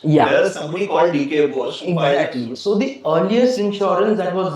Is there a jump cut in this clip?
yes; 1 cut; at 2.5 s

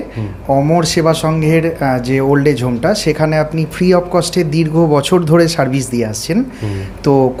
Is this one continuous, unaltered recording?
yes; 0 cuts

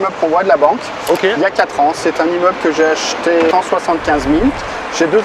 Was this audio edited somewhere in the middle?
yes; 1 cut; at 3.5 s

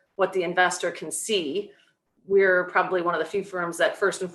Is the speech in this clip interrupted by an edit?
no; 0 cuts

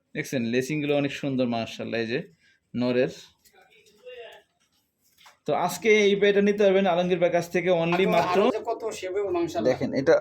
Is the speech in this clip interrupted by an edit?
yes; 1 cut; at 8.5 s

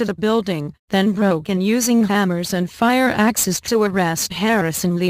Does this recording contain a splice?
yes; 1 cut; at 1.6 s

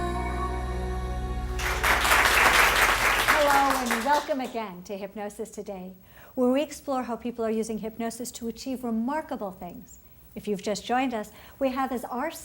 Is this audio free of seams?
no; 1 cut; at 8.9 s

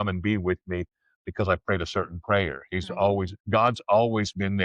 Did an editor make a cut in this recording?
yes; 1 cut; at 3.4 s

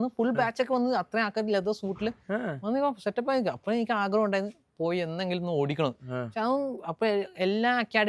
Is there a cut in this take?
no; 0 cuts

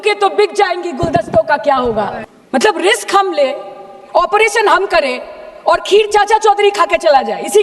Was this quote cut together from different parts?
yes; 1 cut; at 2.2 s

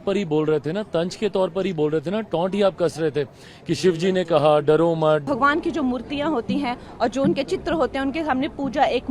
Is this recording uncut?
no; 1 cut; at 5.2 s

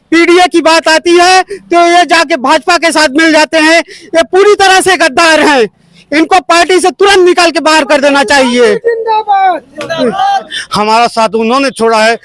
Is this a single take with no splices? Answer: no; 1 cut; at 10.6 s

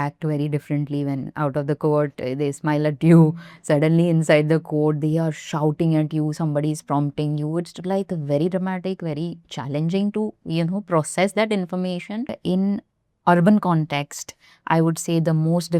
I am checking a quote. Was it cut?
yes; 1 cut; at 12.4 s

